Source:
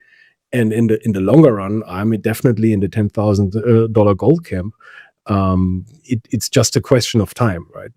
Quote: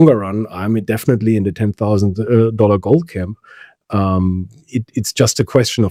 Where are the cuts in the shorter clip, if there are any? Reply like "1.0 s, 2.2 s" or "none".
none